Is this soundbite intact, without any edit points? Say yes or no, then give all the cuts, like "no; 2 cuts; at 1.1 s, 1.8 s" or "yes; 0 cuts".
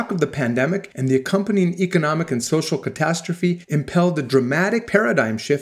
no; 3 cuts; at 0.9 s, 3.6 s, 4.9 s